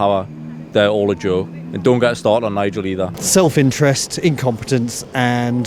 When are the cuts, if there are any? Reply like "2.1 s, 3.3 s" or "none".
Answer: 3.1 s